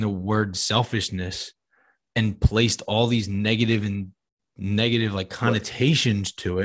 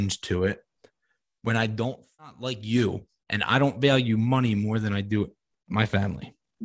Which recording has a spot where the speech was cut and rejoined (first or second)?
second